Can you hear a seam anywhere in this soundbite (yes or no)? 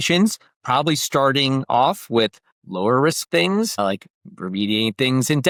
no